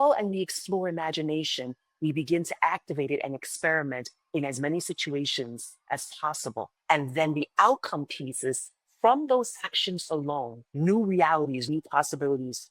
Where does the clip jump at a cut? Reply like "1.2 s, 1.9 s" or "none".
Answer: 6.8 s, 10.6 s, 11.6 s